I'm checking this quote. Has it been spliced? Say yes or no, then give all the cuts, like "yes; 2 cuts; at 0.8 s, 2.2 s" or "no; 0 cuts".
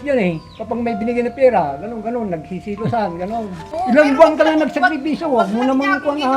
yes; 1 cut; at 3.7 s